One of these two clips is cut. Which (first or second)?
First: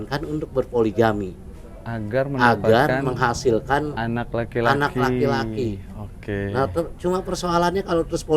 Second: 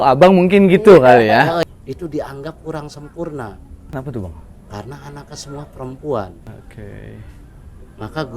second